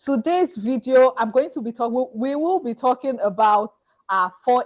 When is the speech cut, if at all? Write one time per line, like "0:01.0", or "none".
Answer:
none